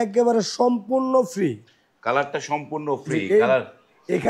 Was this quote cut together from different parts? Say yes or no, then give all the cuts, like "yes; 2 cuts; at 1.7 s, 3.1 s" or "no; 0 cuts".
no; 0 cuts